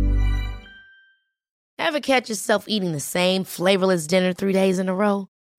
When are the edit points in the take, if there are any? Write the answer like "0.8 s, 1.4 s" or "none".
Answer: 1.5 s